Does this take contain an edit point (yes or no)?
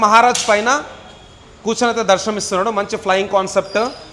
no